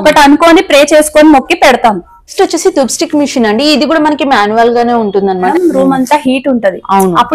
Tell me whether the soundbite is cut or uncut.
cut